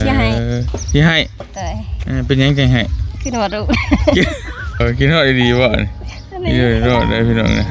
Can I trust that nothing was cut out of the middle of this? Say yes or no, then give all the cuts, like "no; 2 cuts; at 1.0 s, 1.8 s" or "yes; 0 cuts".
no; 1 cut; at 4.8 s